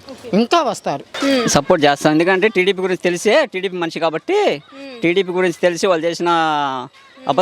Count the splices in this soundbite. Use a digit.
1